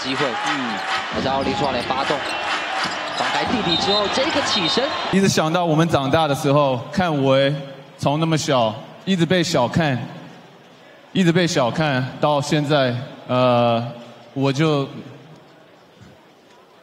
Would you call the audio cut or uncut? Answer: cut